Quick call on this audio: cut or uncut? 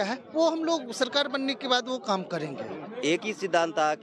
cut